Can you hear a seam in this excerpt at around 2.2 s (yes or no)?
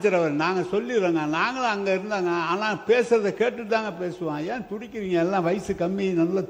no